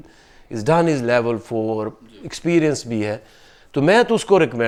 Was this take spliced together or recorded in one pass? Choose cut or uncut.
uncut